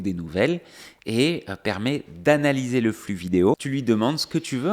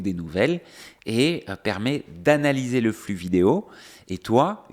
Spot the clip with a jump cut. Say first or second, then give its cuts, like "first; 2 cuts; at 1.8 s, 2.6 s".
first; 1 cut; at 3.6 s